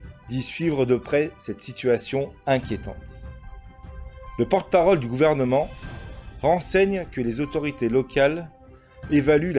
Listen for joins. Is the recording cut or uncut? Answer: uncut